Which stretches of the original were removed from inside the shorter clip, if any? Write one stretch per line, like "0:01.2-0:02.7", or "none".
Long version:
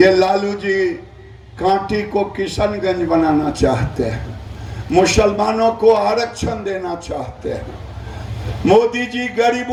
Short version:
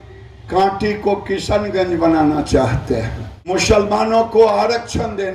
0:04.6-0:05.0